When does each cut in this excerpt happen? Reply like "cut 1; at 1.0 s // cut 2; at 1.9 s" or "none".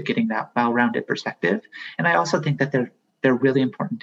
none